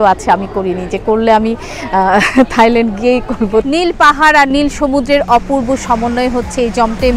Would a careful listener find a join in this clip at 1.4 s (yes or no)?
no